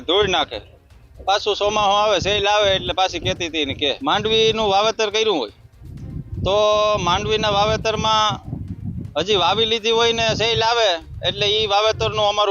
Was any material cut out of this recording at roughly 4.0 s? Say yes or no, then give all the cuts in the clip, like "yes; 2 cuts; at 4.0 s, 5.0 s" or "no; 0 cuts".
yes; 1 cut; at 4.0 s